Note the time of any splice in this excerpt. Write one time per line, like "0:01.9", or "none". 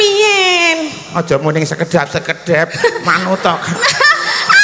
none